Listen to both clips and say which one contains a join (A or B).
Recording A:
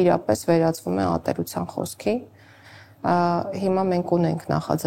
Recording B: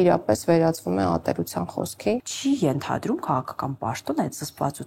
B